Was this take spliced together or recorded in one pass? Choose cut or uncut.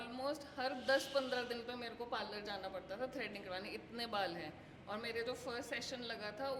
uncut